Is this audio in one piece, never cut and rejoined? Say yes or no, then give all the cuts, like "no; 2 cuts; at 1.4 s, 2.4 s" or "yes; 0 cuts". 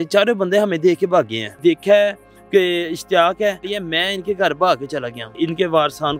no; 3 cuts; at 1.5 s, 3.7 s, 5.3 s